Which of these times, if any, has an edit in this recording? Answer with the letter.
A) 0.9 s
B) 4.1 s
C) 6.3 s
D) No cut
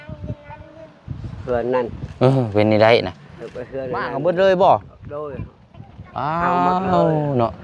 B